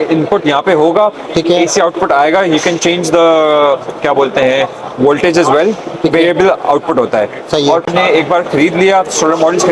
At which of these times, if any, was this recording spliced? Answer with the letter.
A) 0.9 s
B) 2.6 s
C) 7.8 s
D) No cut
C